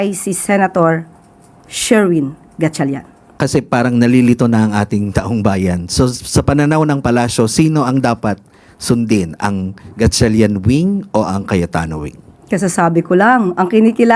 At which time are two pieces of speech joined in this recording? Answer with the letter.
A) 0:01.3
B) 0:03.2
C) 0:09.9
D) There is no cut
B